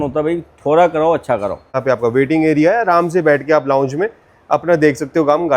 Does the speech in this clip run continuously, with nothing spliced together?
no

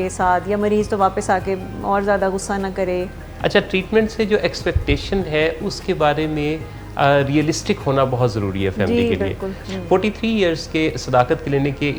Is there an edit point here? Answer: yes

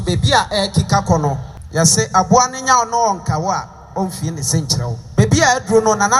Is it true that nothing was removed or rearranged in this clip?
no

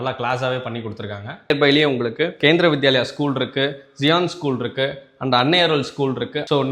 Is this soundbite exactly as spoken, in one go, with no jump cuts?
no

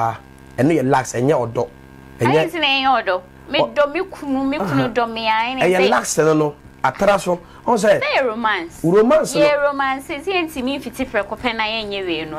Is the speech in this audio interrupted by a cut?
no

